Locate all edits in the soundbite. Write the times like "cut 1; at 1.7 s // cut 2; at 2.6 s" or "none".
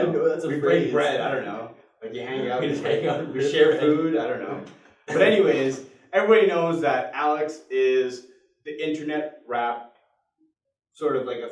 none